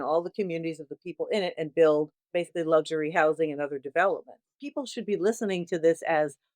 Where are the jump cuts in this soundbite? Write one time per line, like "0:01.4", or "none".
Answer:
0:02.2
0:04.6